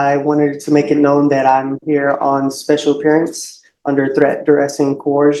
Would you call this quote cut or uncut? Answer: uncut